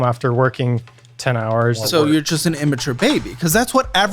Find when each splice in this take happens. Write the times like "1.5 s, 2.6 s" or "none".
1.8 s